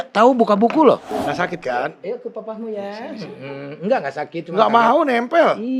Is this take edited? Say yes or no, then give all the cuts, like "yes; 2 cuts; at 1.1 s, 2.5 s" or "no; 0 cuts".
yes; 1 cut; at 1.2 s